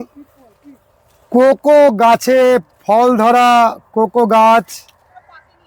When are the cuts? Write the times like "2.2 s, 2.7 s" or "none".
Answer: none